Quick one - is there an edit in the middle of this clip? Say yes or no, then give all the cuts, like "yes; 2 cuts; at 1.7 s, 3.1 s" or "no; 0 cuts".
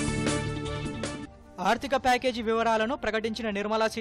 no; 0 cuts